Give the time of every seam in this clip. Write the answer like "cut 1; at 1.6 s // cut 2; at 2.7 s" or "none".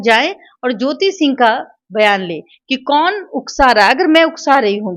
none